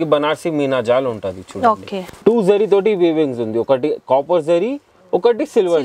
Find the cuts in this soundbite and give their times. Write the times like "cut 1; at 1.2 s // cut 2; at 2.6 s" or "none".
cut 1; at 2.1 s